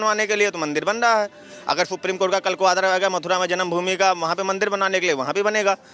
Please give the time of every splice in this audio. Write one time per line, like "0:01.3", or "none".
none